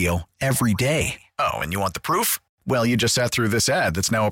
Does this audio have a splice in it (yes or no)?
no